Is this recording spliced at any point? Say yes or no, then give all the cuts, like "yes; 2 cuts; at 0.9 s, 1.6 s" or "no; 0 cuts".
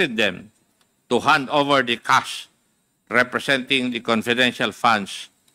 no; 0 cuts